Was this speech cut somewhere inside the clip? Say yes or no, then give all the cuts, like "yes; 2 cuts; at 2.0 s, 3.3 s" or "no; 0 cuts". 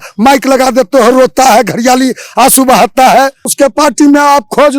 yes; 1 cut; at 3.4 s